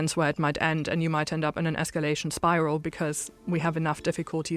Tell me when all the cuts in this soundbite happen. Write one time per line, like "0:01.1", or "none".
none